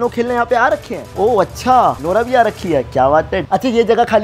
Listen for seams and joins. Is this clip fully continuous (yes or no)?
yes